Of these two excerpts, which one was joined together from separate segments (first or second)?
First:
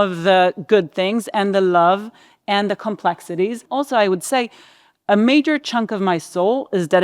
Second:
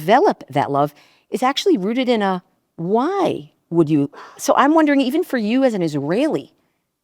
first